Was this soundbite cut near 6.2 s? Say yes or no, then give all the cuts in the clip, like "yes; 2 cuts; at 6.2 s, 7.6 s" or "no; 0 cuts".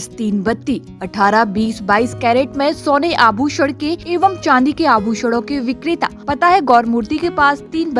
yes; 2 cuts; at 4.0 s, 6.2 s